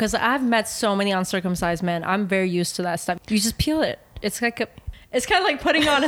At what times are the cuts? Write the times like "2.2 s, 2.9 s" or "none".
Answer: 3.2 s, 4.8 s

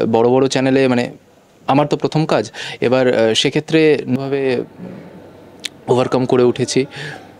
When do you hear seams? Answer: 4.2 s

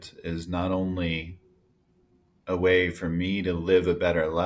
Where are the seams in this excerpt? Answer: none

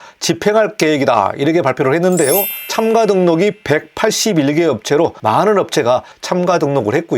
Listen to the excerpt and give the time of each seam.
2.5 s

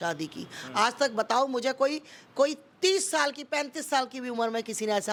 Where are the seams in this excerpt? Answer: none

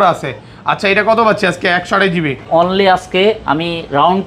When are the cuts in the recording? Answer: 2.4 s

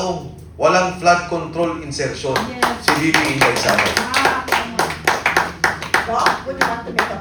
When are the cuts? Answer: none

